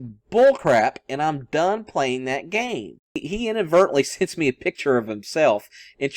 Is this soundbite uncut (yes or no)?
no